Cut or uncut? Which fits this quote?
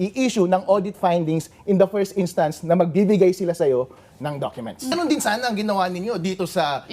cut